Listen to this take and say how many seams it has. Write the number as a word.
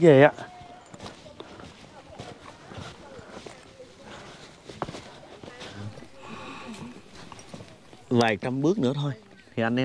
one